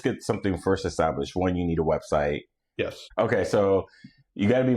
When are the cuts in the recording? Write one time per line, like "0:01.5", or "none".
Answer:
0:03.0